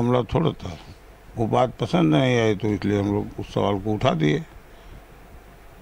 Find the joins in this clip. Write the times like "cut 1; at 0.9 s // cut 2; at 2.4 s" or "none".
none